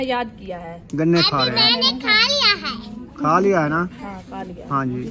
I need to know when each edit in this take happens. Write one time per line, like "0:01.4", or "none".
none